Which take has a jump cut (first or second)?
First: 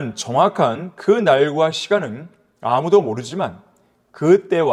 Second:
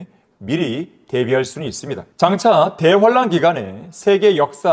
second